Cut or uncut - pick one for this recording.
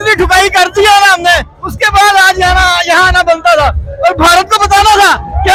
uncut